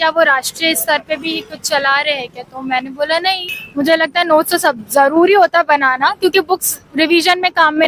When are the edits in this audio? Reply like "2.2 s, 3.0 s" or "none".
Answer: 3.5 s